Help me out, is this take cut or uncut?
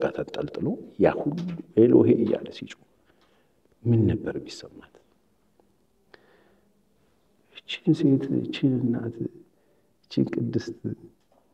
uncut